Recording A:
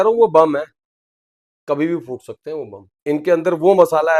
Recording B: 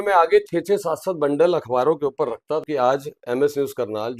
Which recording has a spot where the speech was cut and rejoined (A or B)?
B